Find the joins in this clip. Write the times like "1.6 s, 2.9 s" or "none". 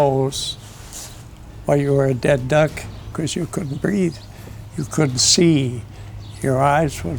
3.1 s